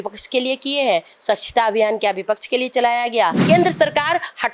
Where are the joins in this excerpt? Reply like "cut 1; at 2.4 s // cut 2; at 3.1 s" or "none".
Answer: cut 1; at 3.4 s